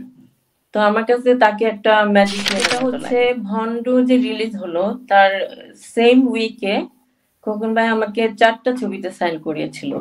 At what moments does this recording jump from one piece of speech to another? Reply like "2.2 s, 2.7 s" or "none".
2.7 s